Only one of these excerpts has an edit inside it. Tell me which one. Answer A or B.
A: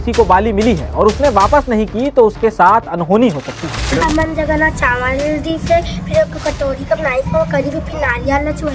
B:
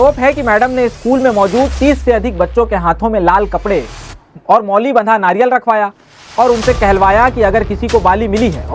A